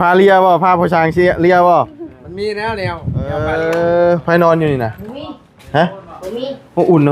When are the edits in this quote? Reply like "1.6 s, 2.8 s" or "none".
3.4 s